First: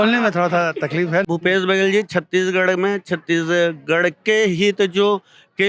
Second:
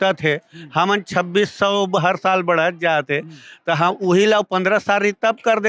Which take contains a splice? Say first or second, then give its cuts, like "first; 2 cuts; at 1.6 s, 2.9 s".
first; 1 cut; at 1.2 s